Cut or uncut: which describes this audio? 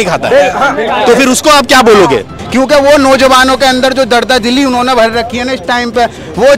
cut